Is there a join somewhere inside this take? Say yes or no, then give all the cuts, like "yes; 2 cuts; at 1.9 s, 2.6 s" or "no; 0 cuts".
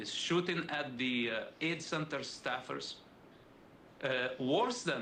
no; 0 cuts